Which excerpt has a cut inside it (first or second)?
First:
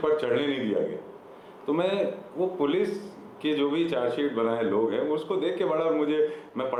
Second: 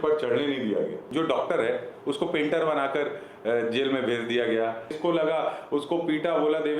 second